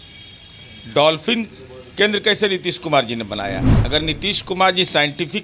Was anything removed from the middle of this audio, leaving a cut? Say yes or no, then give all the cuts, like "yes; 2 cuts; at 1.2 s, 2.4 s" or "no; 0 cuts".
yes; 1 cut; at 3.7 s